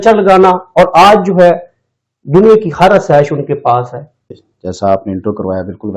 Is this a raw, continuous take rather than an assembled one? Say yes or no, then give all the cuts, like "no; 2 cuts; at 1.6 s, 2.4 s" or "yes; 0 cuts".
no; 1 cut; at 4.4 s